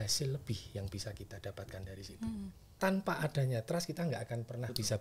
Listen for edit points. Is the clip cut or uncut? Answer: cut